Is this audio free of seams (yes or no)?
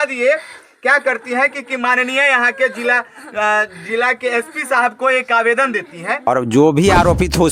no